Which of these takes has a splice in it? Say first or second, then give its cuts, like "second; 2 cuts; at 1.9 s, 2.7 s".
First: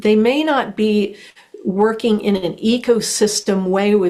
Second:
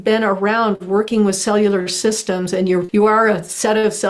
second; 1 cut; at 2.9 s